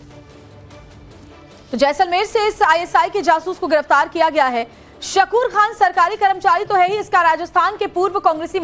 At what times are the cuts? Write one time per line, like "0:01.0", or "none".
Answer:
0:05.4

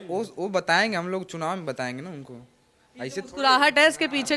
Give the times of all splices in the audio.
none

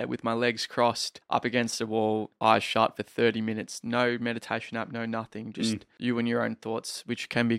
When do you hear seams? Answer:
0:01.1
0:05.9

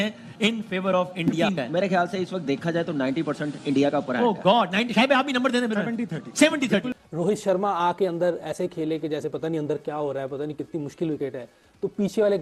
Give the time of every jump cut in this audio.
0:01.5
0:06.9

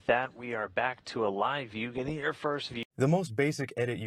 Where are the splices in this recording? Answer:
0:02.8

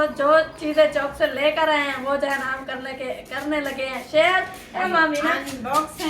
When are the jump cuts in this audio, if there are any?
0:04.8

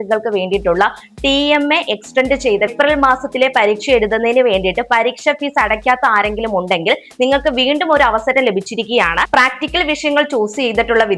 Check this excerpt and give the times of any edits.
0:02.7
0:09.2

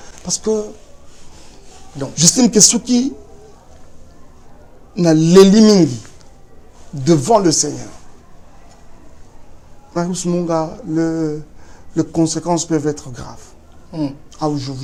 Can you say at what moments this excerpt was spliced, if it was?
none

